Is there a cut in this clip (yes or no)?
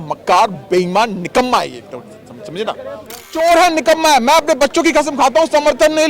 yes